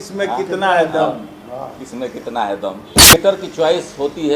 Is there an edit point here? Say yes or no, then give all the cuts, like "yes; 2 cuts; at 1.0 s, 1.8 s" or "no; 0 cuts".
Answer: yes; 1 cut; at 3.1 s